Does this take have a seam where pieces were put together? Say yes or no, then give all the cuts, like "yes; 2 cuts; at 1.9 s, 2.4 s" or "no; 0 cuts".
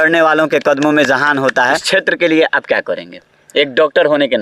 yes; 1 cut; at 1.8 s